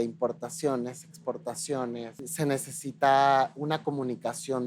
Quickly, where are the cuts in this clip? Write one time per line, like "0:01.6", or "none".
0:02.2